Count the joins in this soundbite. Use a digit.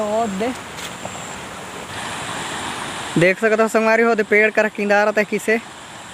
1